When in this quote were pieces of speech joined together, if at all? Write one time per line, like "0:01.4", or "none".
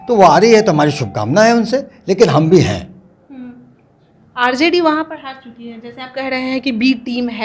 none